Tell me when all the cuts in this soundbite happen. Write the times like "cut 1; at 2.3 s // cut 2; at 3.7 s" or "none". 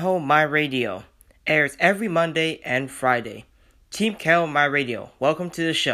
none